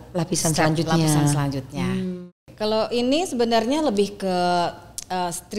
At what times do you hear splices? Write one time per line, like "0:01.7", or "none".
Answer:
0:02.3